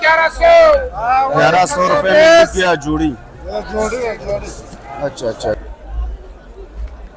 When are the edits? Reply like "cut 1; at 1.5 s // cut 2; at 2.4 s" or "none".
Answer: cut 1; at 5.6 s